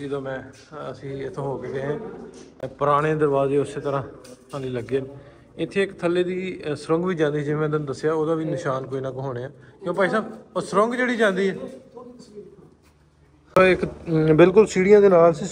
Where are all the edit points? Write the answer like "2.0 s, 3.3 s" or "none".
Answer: none